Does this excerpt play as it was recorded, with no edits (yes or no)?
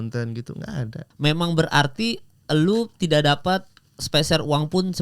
no